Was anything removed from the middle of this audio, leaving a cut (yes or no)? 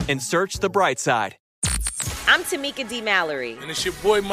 yes